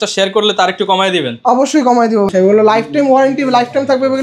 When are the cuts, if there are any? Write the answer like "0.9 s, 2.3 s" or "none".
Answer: 2.3 s